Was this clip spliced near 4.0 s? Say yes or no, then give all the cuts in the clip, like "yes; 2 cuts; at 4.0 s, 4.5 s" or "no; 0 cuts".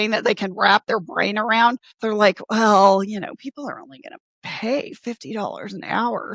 no; 0 cuts